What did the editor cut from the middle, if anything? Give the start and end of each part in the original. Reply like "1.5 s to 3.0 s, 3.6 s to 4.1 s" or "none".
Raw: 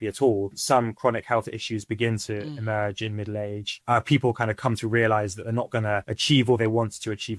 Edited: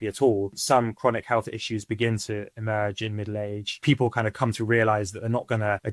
3.8 s to 4.0 s